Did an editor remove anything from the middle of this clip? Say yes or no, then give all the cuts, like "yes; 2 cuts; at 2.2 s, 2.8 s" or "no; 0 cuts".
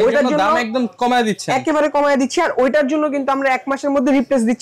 no; 0 cuts